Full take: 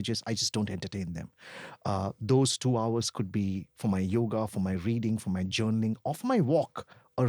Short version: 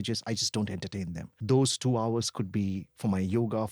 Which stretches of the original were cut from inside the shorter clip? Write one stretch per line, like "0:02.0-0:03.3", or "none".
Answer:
0:01.4-0:02.2